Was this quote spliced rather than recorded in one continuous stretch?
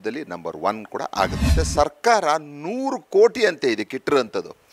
yes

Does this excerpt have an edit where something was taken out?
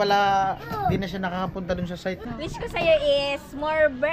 yes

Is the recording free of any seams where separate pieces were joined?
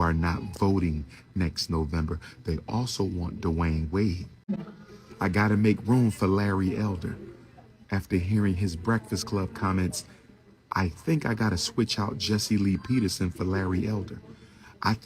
no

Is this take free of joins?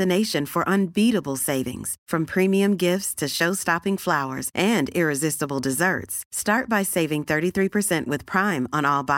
yes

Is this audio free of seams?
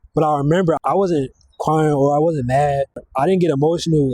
no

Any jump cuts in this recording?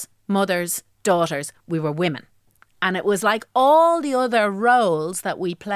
no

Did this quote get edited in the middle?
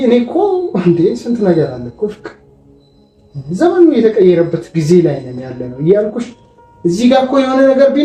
no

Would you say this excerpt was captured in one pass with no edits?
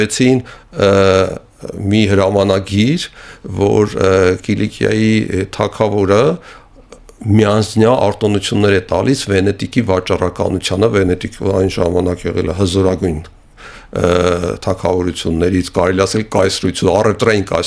yes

